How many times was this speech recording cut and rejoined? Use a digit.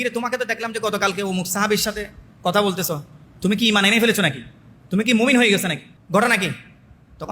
1